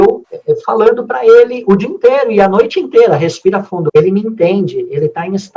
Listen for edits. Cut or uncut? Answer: cut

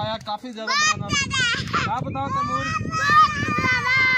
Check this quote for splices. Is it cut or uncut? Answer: uncut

